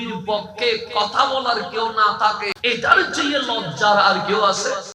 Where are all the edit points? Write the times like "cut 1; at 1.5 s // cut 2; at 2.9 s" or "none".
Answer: cut 1; at 2.5 s